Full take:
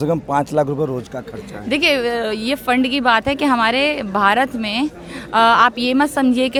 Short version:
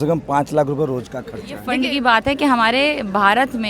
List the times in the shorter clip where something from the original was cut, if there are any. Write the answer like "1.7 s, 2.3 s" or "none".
1.6 s